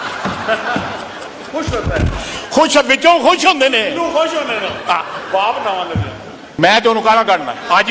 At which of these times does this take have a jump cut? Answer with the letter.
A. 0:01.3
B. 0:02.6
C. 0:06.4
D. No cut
C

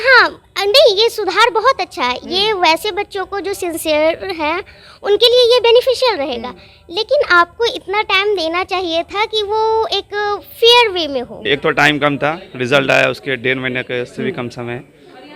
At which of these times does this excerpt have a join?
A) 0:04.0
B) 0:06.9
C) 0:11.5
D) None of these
C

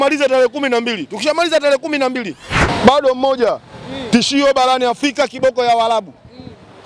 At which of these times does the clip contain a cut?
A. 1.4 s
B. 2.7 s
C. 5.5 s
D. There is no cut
B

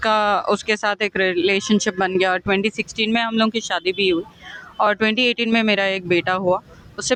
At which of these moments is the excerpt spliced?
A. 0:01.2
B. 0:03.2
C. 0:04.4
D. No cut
D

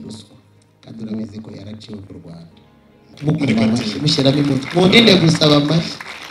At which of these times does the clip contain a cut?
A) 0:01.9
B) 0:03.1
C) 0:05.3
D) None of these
B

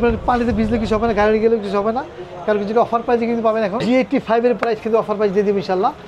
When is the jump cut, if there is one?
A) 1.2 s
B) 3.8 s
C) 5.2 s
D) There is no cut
B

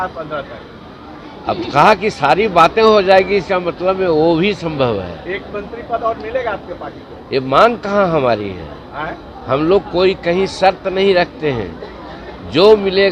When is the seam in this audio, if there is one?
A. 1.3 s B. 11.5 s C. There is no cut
C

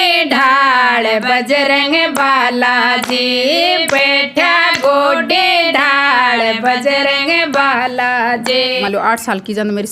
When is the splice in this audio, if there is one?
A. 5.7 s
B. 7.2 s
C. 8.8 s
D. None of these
C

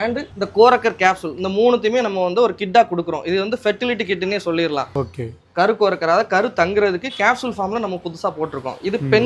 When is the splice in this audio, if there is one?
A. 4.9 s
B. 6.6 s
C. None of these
A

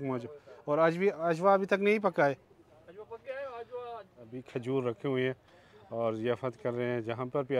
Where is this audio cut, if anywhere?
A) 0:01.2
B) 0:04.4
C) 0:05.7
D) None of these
B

